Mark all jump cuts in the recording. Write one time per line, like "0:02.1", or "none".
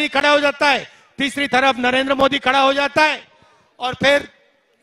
none